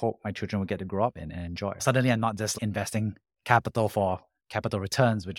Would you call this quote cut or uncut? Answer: cut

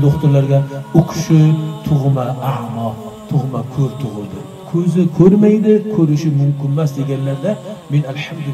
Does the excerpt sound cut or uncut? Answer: cut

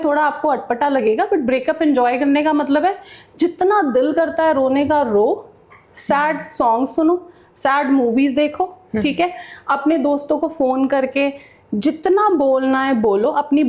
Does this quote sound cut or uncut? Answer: uncut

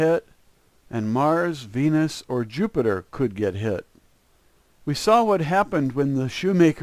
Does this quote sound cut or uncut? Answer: cut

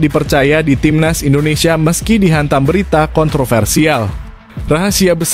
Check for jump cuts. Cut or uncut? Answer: uncut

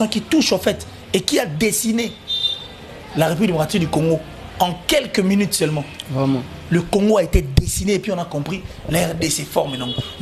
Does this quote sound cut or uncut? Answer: uncut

